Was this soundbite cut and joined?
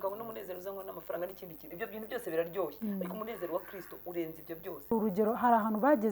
yes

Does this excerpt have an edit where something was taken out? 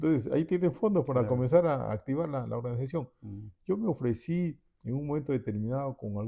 no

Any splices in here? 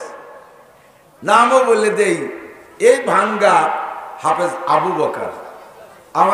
no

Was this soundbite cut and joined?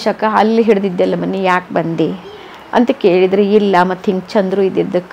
no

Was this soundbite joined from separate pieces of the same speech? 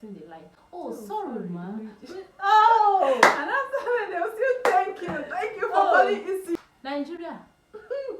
yes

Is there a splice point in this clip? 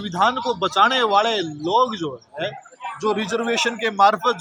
no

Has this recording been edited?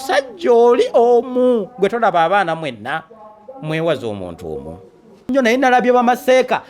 yes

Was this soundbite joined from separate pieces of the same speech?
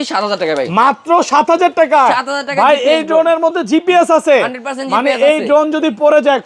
no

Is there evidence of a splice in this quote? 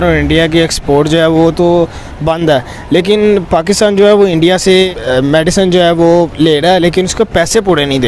no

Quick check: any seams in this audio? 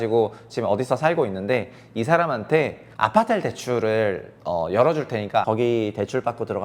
yes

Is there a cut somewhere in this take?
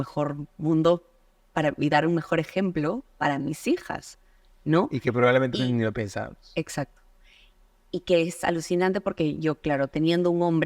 no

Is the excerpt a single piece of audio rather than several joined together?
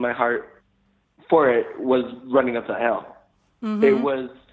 yes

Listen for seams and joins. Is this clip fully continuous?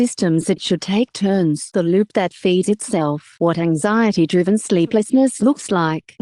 yes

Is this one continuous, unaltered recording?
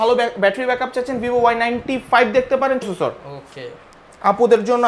no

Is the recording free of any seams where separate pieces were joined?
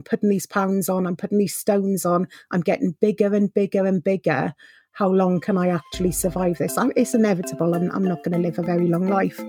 no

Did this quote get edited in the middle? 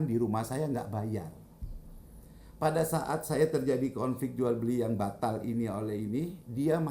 no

